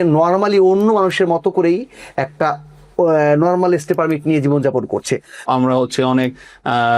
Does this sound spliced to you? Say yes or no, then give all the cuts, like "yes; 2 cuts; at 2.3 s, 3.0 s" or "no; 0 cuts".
yes; 1 cut; at 5.4 s